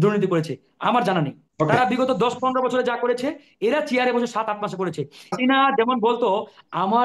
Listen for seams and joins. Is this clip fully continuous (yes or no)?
no